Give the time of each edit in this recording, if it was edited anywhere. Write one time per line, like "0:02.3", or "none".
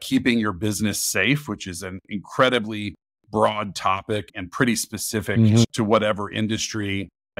0:05.6

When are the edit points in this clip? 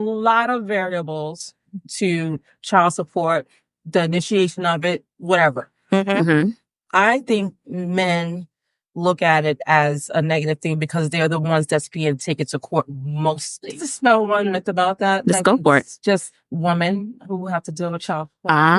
0:13.9

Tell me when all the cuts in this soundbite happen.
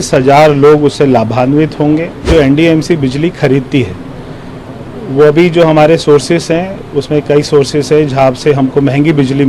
0:02.3

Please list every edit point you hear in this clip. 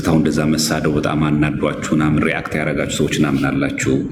none

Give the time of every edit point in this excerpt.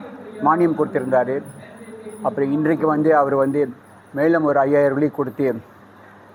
none

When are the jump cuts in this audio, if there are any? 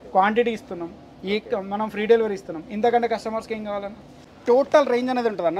0:04.3

